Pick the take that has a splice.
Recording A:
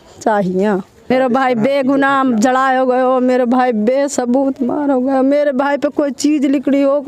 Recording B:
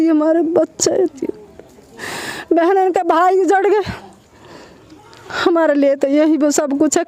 A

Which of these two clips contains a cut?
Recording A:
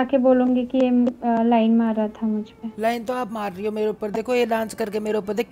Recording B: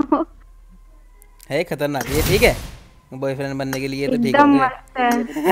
A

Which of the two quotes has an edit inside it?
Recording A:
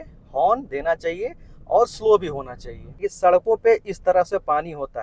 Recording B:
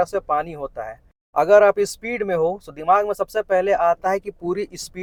A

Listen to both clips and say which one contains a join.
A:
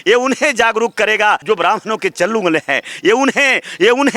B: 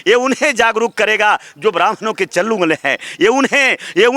A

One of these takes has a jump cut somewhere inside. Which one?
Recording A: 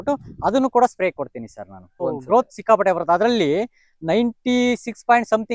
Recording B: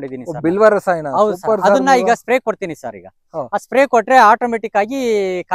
A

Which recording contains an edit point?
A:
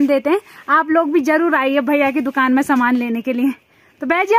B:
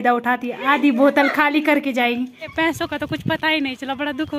B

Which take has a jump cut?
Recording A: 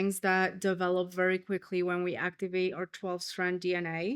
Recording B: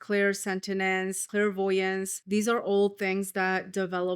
B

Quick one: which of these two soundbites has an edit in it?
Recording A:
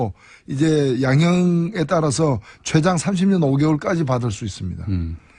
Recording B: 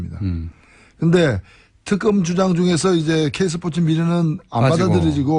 A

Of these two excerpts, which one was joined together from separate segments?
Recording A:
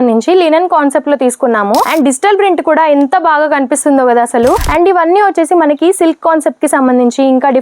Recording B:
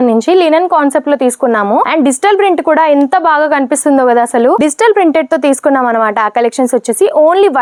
A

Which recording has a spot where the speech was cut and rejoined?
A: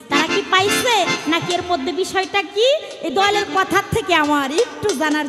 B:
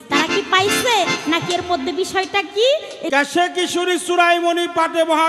B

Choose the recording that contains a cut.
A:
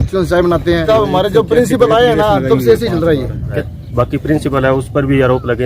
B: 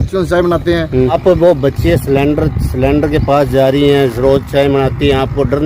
A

